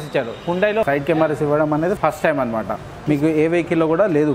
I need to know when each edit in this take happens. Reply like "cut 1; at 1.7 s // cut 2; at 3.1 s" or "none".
cut 1; at 2.0 s